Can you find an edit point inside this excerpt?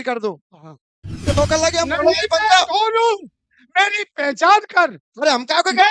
yes; 1 cut; at 1.2 s

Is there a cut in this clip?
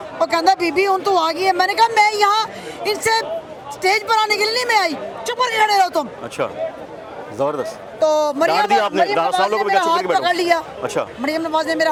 no; 0 cuts

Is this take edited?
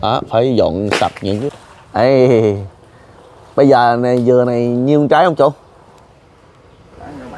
yes; 1 cut; at 1.5 s

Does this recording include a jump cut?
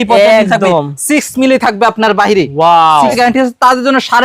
yes; 1 cut; at 3.2 s

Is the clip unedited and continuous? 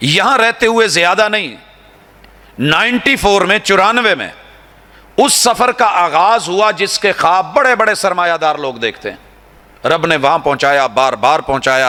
yes; 0 cuts

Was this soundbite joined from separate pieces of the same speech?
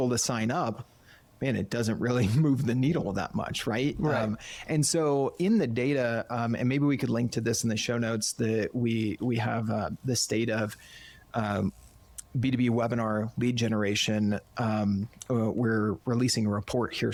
no; 0 cuts

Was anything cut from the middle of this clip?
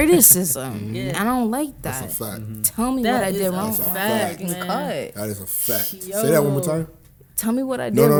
no; 0 cuts

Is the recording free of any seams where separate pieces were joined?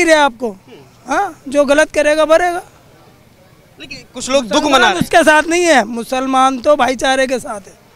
yes; 0 cuts

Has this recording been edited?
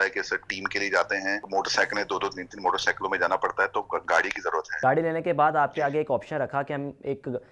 yes; 2 cuts; at 1.4 s, 4.7 s

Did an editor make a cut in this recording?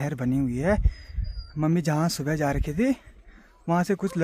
no; 0 cuts

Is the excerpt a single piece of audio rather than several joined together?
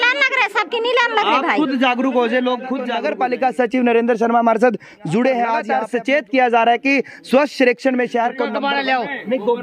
no; 3 cuts; at 2.9 s, 5.7 s, 8.5 s

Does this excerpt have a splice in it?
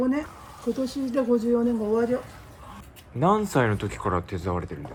no; 0 cuts

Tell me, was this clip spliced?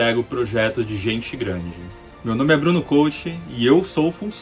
no; 0 cuts

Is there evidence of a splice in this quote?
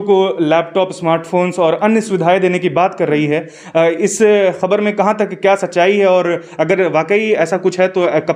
no; 0 cuts

